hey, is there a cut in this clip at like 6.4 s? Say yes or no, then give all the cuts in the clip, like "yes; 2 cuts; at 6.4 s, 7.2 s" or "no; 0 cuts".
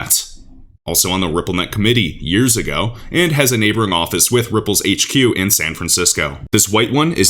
yes; 1 cut; at 6.4 s